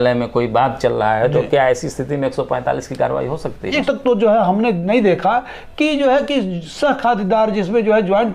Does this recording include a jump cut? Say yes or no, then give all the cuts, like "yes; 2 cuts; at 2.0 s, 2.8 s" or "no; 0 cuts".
yes; 1 cut; at 3.8 s